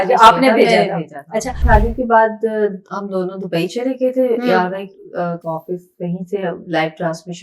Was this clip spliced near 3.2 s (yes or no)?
no